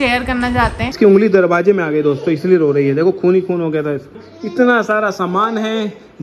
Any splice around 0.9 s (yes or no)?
yes